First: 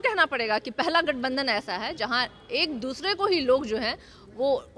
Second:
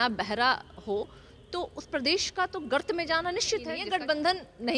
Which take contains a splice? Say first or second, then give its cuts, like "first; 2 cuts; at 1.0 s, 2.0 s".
second; 1 cut; at 3.8 s